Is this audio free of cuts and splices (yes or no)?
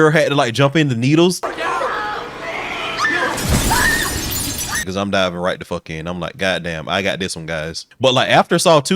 no